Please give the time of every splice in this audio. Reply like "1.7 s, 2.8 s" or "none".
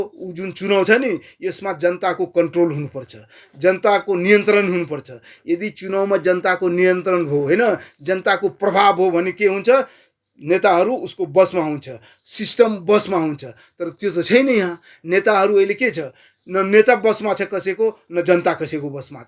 none